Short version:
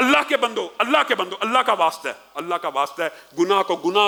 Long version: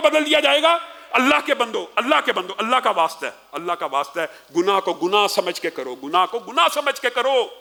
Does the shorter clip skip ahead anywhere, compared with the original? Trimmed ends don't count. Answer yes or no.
no